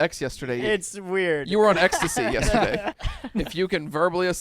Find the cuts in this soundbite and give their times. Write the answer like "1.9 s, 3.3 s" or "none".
2.9 s